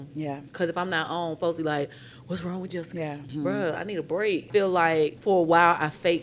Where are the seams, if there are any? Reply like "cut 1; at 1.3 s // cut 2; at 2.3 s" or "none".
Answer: cut 1; at 3.3 s // cut 2; at 4.5 s // cut 3; at 5.2 s